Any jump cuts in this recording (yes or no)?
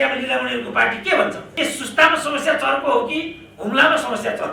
no